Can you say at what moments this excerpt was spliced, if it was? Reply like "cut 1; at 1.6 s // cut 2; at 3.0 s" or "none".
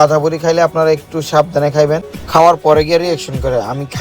cut 1; at 2.1 s